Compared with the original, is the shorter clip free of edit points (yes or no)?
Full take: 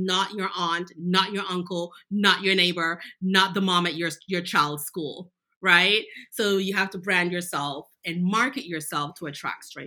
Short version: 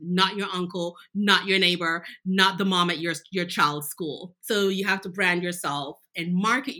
no